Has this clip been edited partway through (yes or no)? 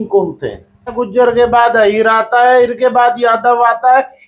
yes